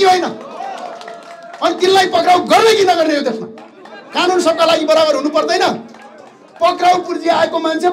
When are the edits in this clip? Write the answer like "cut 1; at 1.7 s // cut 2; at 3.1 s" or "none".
none